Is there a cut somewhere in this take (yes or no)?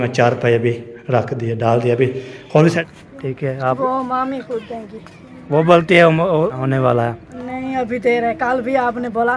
yes